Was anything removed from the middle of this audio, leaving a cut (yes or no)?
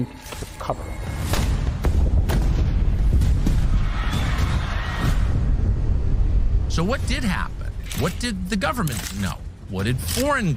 no